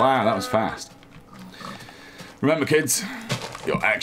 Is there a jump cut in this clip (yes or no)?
no